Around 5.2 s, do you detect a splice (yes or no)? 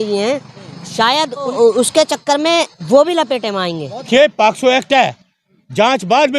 no